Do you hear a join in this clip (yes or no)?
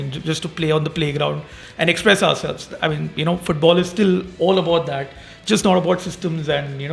no